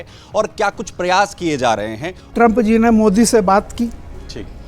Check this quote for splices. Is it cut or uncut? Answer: cut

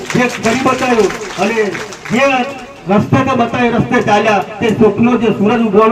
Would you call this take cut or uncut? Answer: uncut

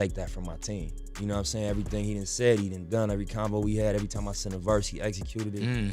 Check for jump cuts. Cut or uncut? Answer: cut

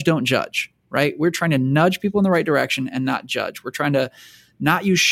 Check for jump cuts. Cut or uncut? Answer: uncut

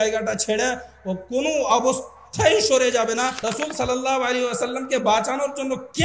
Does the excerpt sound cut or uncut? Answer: cut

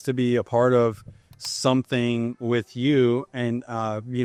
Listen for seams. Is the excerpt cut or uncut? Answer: uncut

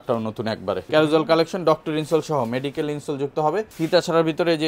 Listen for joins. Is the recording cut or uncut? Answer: cut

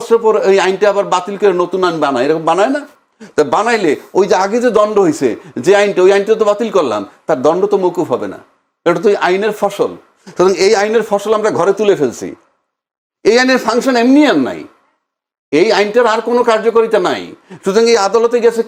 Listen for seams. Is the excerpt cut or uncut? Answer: uncut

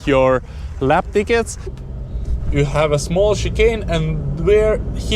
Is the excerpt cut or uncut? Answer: cut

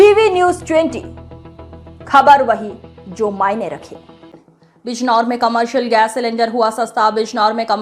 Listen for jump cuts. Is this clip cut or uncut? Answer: cut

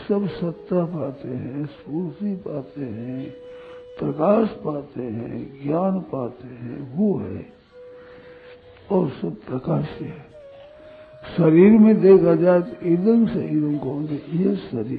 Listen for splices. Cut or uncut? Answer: uncut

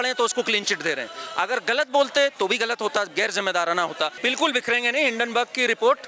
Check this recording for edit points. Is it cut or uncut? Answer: cut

